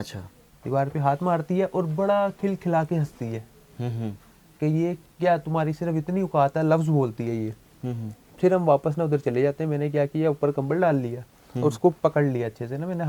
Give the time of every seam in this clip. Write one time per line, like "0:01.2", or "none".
none

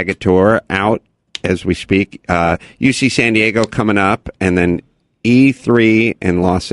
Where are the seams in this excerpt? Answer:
0:05.6

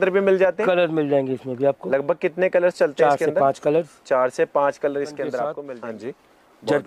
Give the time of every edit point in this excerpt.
0:05.6

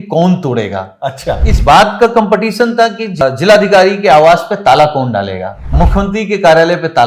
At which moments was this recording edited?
0:03.2
0:05.7

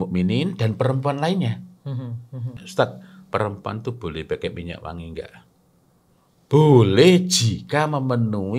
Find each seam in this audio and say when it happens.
0:02.6

